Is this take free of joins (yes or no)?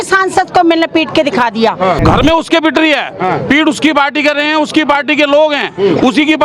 no